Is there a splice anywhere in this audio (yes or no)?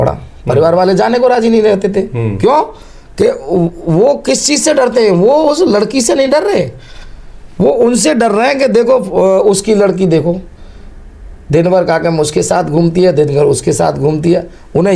no